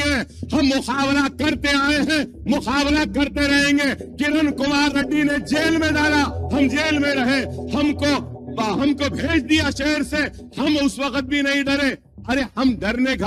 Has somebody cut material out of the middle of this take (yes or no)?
no